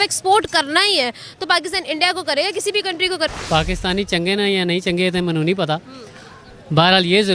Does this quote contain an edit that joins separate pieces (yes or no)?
yes